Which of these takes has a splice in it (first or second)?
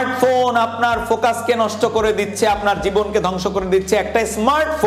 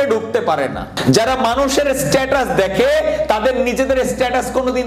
second